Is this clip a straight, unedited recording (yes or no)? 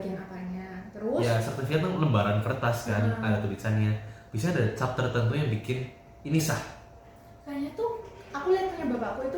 no